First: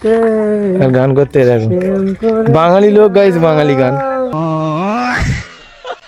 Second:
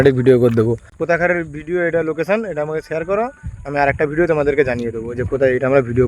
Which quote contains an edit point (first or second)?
second